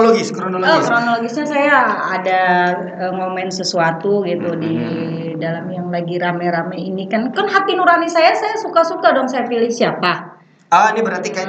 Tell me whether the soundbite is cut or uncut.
uncut